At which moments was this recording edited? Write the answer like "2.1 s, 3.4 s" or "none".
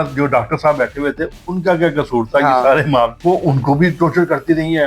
3.2 s